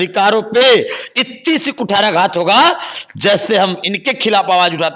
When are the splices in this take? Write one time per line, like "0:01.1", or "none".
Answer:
none